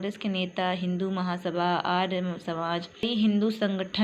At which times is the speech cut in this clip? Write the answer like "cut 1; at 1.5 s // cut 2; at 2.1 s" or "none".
cut 1; at 3.0 s